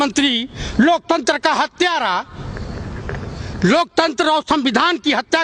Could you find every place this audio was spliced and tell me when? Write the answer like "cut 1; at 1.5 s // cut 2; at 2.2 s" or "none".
none